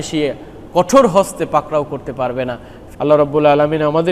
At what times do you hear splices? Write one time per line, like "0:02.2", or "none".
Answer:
0:02.8

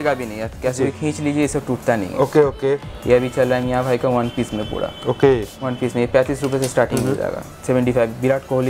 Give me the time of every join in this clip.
0:02.9
0:07.5

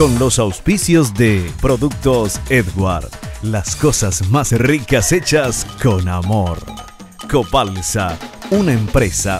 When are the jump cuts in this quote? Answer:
0:01.5

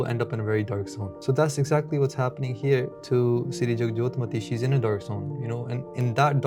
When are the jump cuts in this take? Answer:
0:01.0
0:03.0

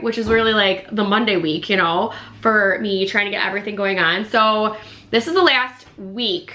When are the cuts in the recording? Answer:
none

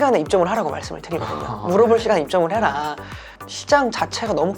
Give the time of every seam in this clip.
0:03.4

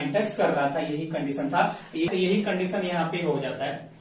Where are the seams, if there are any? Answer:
0:02.1

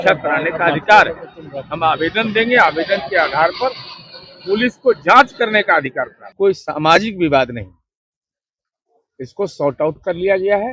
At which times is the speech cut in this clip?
0:06.2

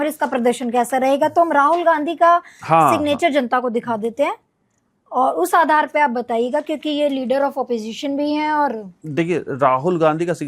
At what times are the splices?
none

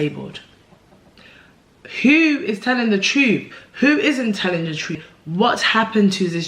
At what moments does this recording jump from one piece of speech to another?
0:05.0

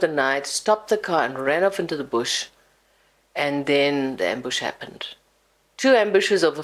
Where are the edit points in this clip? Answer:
none

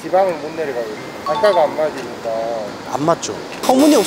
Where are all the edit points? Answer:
0:01.1

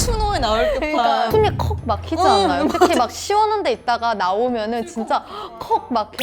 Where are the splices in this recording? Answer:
0:01.3

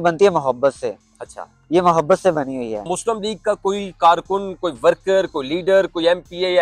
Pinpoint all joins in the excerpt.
0:02.9

